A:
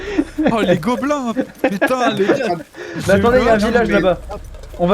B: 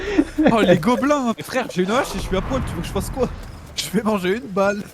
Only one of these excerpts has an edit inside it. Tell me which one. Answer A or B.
B